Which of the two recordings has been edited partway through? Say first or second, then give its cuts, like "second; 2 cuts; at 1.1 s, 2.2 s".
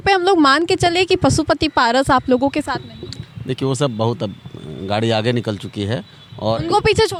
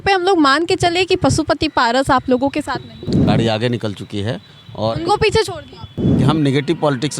second; 2 cuts; at 3.2 s, 6.2 s